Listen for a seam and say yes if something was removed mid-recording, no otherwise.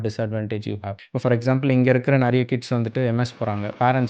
yes